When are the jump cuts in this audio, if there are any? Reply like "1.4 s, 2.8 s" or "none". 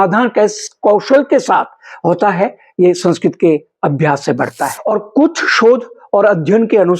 4.8 s